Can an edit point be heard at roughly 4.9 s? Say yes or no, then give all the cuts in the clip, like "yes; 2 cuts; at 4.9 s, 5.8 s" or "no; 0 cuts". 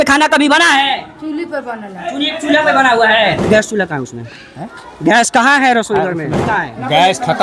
no; 2 cuts; at 3.4 s, 6.4 s